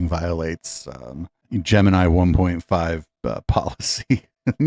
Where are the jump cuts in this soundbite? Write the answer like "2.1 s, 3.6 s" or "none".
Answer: none